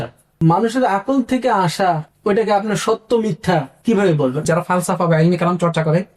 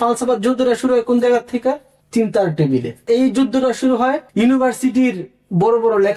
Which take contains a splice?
first; 1 cut; at 4.4 s

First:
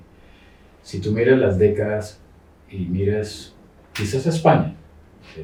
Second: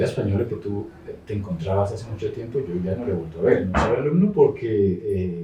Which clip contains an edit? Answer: second; 1 cut; at 3.9 s

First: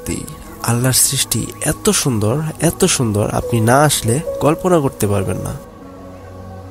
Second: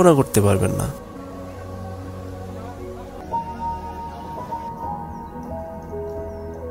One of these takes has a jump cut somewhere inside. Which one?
second; 1 cut; at 3.2 s

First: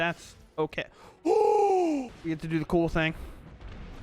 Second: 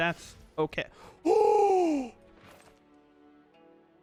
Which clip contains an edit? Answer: first; 1 cut; at 2.1 s

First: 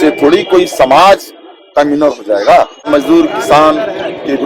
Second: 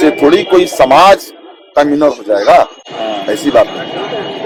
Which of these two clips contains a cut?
first; 1 cut; at 2.9 s

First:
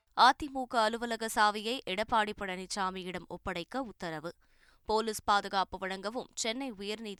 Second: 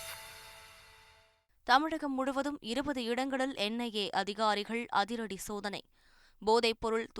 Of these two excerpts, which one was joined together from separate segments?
second; 1 cut; at 1.3 s

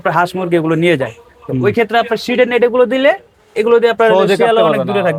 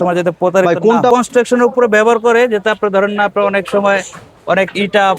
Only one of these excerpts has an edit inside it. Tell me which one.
second; 1 cut; at 1.1 s

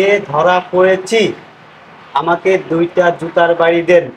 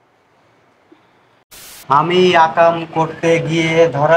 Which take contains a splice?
second; 1 cut; at 1.8 s

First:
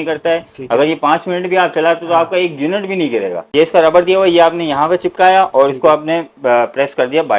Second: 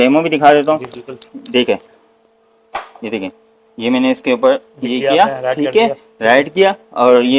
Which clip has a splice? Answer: first; 1 cut; at 3.4 s

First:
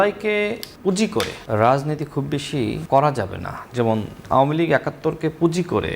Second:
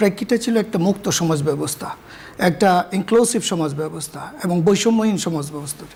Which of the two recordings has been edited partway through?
first; 2 cuts; at 1.1 s, 2.8 s

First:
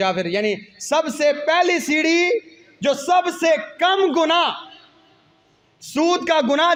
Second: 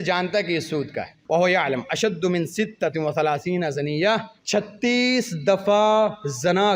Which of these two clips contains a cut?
second; 2 cuts; at 1.1 s, 4.3 s

